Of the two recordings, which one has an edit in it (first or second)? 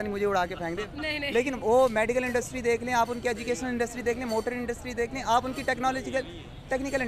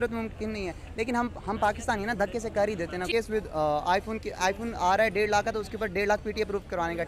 second